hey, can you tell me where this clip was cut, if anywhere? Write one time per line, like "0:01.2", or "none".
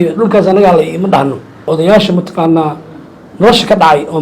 0:01.7